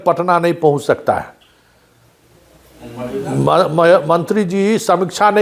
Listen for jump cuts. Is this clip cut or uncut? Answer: uncut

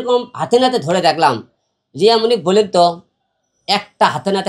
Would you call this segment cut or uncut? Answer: uncut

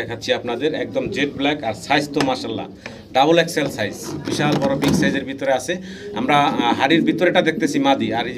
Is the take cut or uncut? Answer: uncut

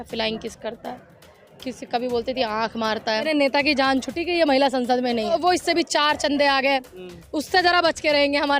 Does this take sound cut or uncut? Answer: cut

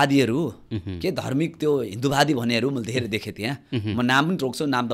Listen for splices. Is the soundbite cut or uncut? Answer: uncut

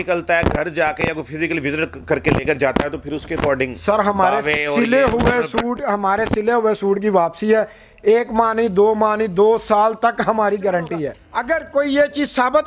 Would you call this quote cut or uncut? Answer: cut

